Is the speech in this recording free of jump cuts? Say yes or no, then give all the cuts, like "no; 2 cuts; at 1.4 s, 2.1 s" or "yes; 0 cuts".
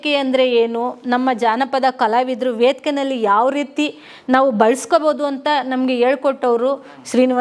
yes; 0 cuts